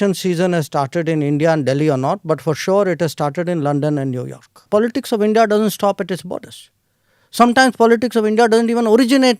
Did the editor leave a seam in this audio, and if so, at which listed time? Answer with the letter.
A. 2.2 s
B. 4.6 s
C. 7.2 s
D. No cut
B